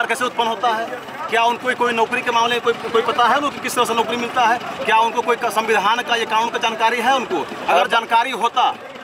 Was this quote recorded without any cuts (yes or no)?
yes